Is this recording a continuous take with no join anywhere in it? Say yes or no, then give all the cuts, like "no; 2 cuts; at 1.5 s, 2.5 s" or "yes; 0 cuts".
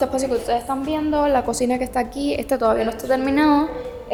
yes; 0 cuts